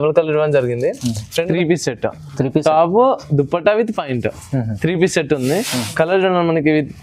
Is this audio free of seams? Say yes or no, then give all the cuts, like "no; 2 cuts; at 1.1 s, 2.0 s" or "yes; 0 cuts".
no; 1 cut; at 1.4 s